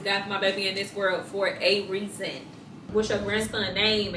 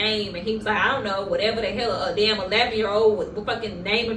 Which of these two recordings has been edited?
first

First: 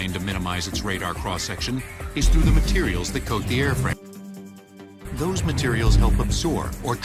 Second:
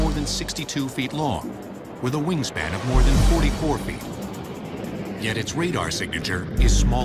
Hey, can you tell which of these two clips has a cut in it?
first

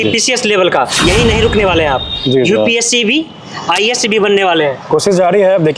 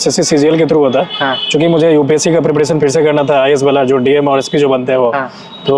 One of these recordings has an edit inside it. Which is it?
first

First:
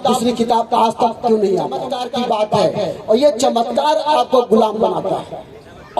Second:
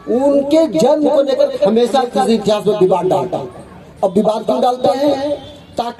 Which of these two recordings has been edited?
first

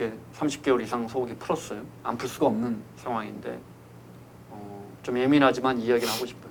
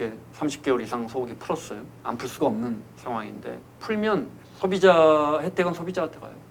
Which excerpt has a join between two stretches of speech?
second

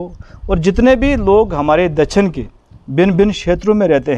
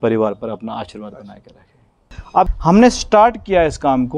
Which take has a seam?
second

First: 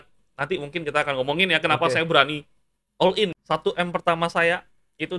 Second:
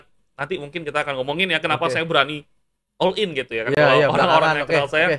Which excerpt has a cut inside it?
first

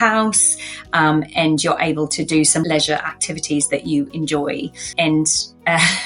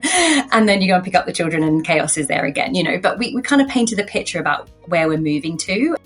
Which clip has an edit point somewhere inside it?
first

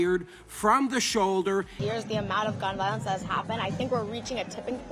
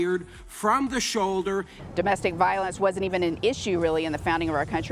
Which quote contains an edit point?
first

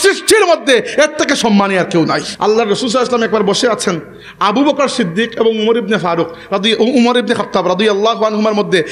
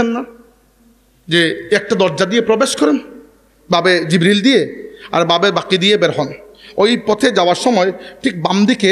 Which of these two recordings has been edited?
first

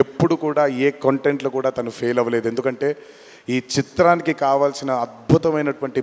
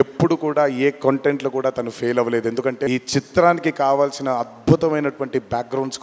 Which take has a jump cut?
second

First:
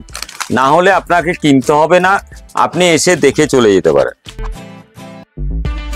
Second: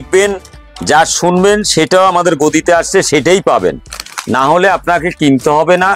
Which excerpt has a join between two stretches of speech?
first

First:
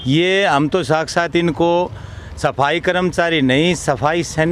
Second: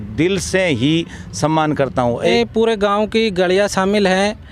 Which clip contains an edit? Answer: second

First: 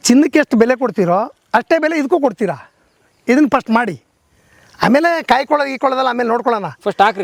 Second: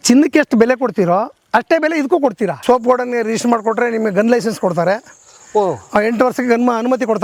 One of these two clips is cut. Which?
second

